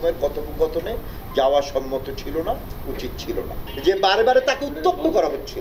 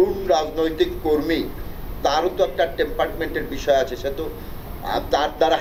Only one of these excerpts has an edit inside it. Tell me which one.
first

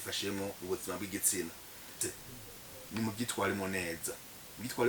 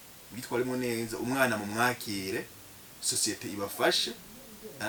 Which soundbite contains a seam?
first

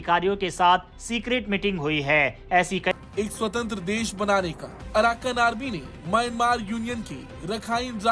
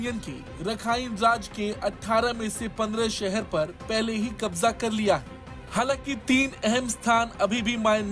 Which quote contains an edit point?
first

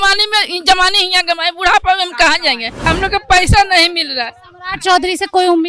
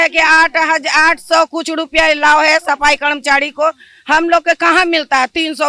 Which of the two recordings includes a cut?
first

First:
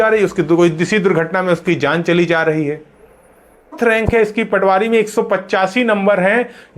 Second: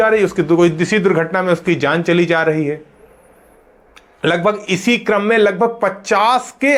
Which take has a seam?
first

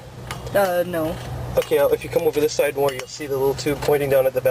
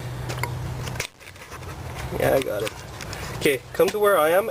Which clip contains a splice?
first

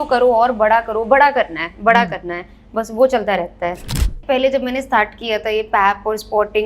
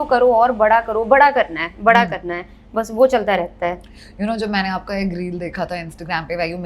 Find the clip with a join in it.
first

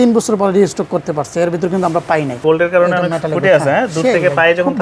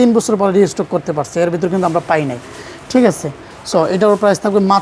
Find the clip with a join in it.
first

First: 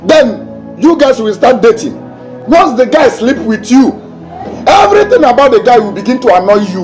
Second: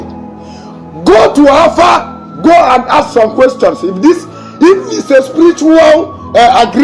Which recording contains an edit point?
first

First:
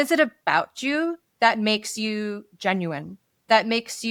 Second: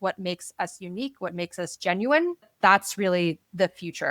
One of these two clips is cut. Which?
second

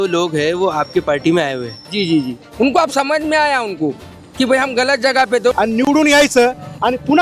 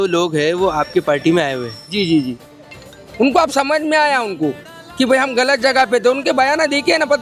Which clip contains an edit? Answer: first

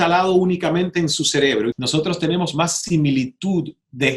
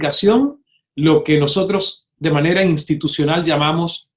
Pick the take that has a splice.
first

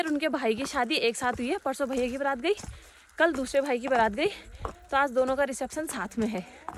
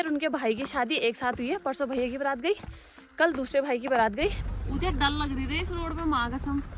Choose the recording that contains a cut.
second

